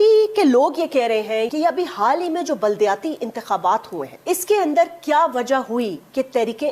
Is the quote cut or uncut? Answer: cut